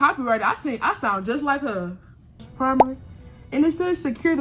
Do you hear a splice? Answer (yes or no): yes